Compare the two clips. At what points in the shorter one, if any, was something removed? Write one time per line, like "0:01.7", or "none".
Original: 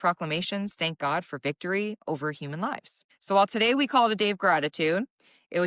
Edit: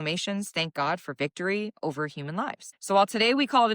0:02.7